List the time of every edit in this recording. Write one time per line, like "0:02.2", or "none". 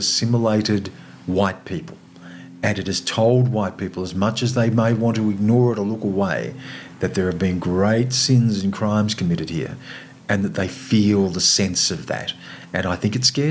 none